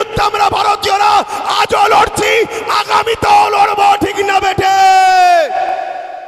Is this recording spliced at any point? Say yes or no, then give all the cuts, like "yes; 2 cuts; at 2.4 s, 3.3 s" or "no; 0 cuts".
no; 0 cuts